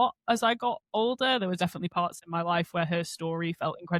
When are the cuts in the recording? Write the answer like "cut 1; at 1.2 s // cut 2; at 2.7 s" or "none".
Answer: none